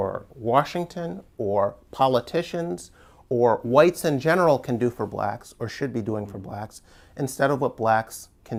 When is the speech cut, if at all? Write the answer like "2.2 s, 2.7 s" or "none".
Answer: none